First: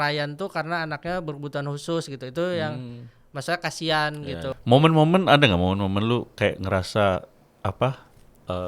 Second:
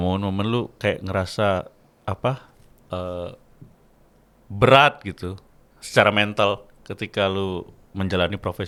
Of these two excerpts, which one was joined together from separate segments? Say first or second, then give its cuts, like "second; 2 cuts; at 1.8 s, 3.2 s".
first; 1 cut; at 4.6 s